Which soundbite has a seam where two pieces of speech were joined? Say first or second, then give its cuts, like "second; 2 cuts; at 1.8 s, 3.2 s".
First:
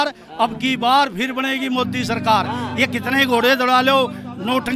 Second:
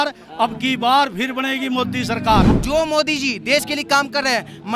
second; 1 cut; at 2.5 s